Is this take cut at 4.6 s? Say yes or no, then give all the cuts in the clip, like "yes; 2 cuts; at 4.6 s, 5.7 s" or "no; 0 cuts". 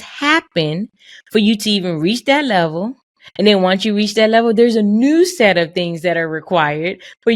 no; 0 cuts